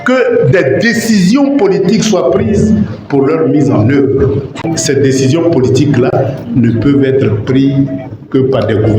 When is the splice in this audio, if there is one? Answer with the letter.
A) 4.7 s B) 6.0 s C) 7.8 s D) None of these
A